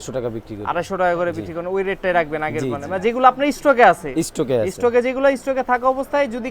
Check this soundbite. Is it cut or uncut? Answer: uncut